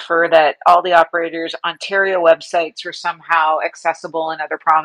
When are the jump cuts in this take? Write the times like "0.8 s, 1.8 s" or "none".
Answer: none